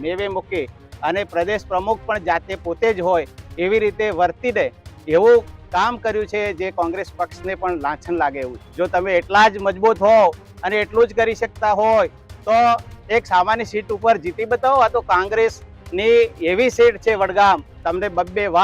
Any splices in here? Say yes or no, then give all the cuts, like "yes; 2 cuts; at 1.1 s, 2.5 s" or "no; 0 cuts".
yes; 2 cuts; at 8.6 s, 17.8 s